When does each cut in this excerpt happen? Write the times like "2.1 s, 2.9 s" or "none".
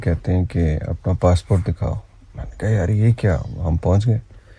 none